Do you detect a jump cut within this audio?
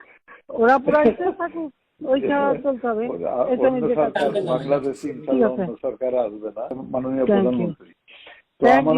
yes; 1 cut; at 6.8 s

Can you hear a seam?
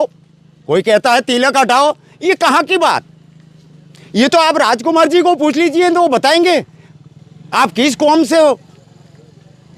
no; 0 cuts

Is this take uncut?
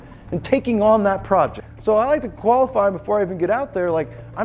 no; 1 cut; at 1.6 s

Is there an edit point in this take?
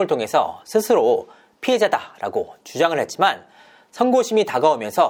no; 0 cuts

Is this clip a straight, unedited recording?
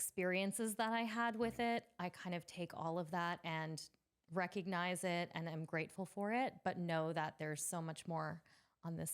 yes; 0 cuts

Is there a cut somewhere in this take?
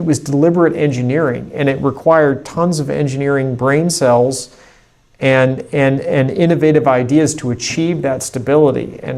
no; 0 cuts

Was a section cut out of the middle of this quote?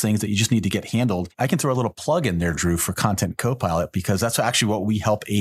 yes; 1 cut; at 1.3 s

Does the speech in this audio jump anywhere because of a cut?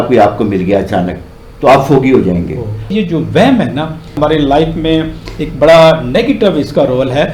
yes; 1 cut; at 2.9 s

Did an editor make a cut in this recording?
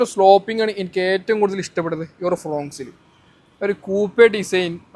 no; 0 cuts

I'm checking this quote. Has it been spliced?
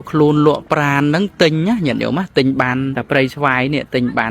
yes; 1 cut; at 3.0 s

